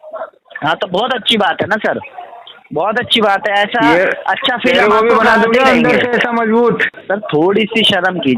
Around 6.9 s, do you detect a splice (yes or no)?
yes